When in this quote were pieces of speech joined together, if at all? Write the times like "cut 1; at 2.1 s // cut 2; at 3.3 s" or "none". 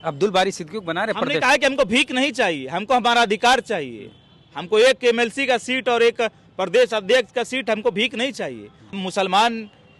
cut 1; at 8.9 s